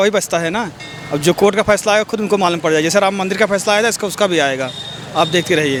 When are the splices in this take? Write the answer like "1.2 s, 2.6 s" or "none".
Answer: none